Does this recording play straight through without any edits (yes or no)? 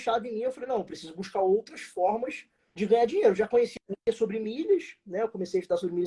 yes